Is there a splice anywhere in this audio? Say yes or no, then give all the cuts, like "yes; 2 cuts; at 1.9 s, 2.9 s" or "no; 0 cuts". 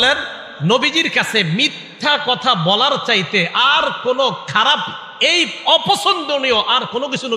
no; 0 cuts